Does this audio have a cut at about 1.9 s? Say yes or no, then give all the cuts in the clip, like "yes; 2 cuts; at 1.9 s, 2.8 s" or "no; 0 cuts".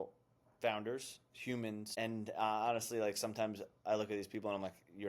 yes; 1 cut; at 1.9 s